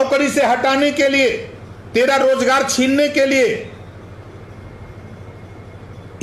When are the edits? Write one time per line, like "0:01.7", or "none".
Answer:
none